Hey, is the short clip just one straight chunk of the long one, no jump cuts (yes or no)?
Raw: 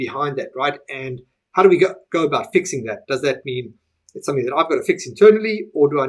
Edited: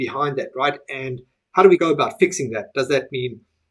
no